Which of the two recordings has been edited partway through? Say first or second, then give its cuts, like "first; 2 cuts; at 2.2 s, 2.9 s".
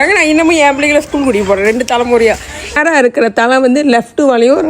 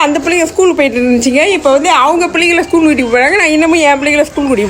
first; 1 cut; at 2.8 s